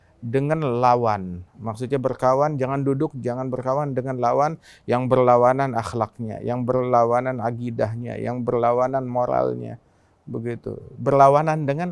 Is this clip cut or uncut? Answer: uncut